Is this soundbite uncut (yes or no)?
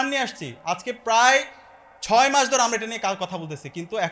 yes